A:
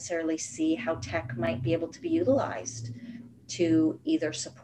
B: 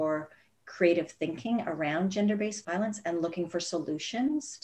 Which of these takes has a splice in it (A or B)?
B